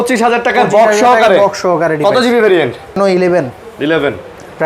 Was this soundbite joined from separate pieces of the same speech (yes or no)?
yes